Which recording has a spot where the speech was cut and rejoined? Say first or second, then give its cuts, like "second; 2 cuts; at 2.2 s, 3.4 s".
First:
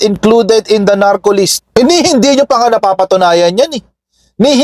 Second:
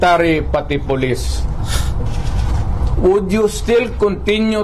first; 1 cut; at 1.6 s